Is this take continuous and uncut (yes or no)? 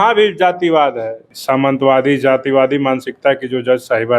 no